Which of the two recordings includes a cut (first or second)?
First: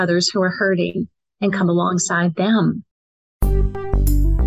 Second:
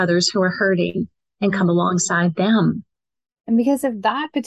first